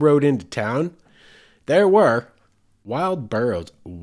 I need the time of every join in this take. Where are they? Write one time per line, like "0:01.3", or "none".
0:02.7